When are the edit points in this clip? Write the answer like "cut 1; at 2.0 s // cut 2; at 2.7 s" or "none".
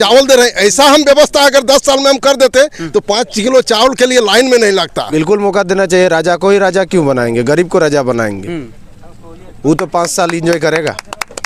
cut 1; at 5.1 s